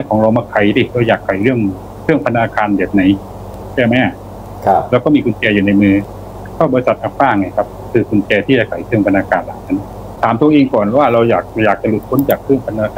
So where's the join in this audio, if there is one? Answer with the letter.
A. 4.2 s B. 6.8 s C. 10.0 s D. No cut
C